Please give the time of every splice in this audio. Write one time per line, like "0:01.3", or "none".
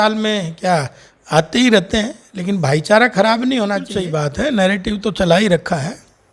0:04.2